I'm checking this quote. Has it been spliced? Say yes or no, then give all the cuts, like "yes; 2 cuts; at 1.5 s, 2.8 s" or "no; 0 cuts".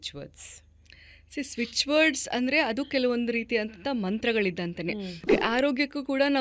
yes; 1 cut; at 5.2 s